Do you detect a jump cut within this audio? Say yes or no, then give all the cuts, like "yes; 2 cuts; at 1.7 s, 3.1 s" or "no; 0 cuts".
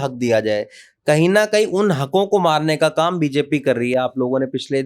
no; 0 cuts